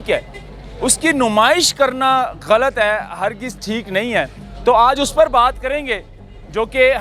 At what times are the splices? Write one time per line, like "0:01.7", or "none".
none